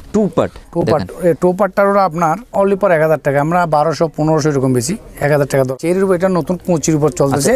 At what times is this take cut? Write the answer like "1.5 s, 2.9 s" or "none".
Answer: 2.4 s, 5.7 s